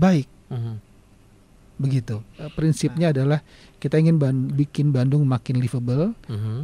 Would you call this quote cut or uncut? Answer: cut